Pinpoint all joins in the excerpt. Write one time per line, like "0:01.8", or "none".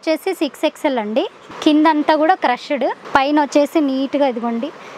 0:01.4
0:03.0